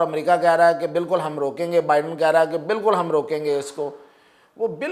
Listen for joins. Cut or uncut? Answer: uncut